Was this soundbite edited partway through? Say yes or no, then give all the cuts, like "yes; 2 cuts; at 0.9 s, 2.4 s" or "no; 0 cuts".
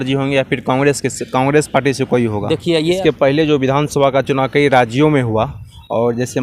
yes; 1 cut; at 3.0 s